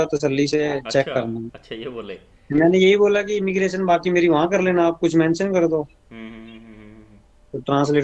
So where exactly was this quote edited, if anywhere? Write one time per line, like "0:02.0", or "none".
none